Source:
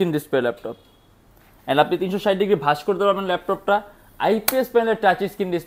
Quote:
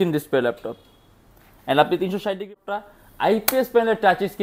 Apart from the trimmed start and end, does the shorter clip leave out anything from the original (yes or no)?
yes